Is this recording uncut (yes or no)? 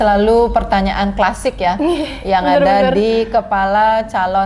yes